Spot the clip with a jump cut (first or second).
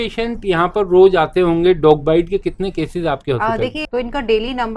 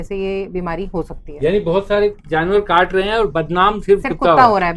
first